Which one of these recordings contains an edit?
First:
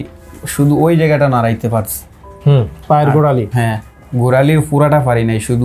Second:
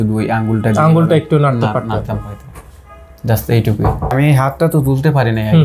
second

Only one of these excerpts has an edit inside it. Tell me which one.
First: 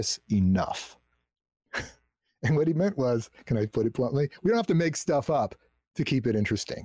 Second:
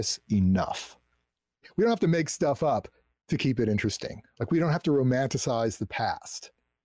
second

